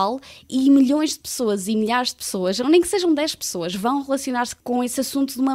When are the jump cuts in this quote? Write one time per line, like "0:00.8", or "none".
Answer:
0:04.5